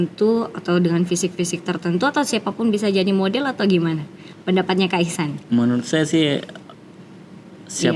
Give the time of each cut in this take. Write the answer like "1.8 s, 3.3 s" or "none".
none